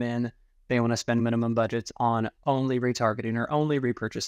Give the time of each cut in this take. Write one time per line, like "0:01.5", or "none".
none